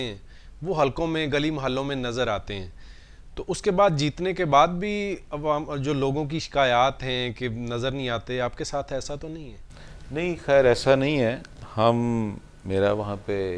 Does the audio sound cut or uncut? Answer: uncut